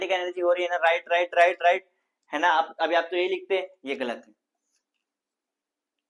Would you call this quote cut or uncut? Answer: uncut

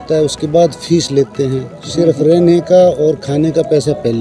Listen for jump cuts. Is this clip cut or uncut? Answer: uncut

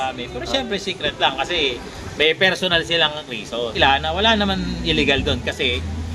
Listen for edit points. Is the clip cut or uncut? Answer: cut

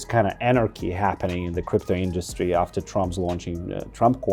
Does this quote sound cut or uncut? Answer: uncut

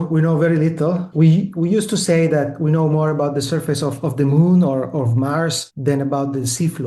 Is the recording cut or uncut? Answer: cut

